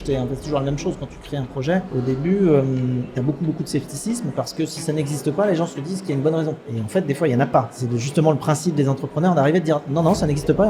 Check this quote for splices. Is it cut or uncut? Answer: cut